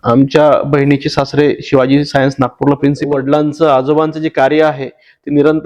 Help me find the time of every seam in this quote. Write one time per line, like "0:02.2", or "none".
0:03.0